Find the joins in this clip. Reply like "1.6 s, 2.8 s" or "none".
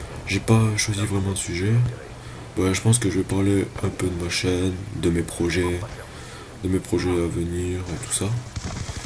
2.5 s

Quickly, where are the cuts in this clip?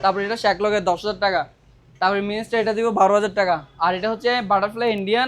none

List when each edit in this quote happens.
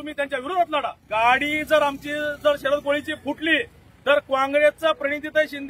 1.0 s

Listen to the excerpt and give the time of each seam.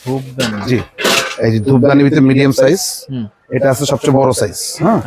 none

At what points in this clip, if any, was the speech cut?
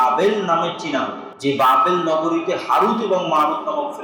1.2 s

